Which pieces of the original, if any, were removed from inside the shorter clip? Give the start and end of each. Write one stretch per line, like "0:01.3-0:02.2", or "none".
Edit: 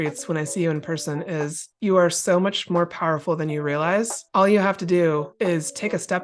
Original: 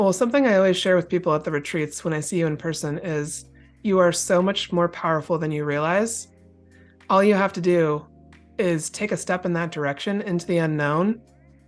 0:03.4-0:03.7
0:06.2-0:06.9
0:08.0-0:08.5